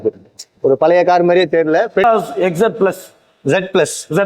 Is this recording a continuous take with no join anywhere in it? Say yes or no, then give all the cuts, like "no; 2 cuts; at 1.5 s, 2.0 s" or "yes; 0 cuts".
no; 1 cut; at 2.0 s